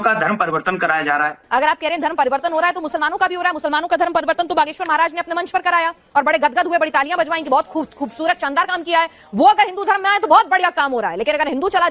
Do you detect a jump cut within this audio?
yes; 1 cut; at 1.4 s

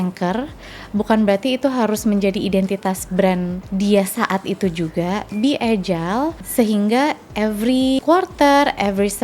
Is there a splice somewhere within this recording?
yes; 3 cuts; at 3.6 s, 6.4 s, 8.0 s

